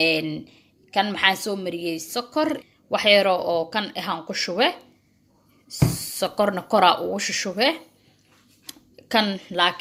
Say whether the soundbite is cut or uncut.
cut